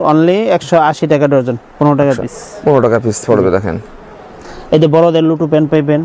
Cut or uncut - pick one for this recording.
uncut